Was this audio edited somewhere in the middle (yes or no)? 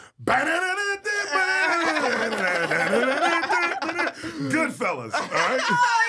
no